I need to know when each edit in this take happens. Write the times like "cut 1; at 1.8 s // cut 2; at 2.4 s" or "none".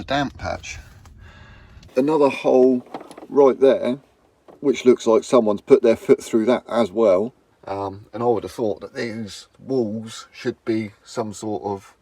cut 1; at 1.8 s // cut 2; at 7.5 s